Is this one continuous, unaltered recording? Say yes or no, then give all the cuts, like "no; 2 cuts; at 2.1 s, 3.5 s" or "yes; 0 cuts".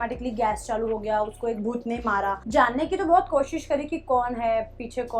no; 1 cut; at 2.4 s